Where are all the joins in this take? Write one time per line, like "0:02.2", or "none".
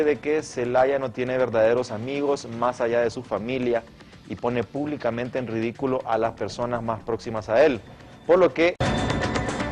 none